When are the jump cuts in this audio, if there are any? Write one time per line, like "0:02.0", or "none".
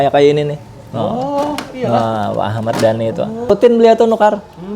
0:03.5